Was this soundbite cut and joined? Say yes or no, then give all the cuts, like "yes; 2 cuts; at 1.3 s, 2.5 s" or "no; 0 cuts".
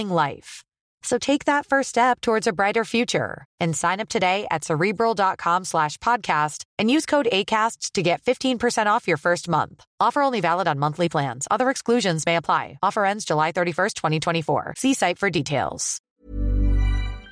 yes; 1 cut; at 16.0 s